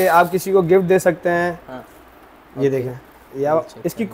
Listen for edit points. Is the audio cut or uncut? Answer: uncut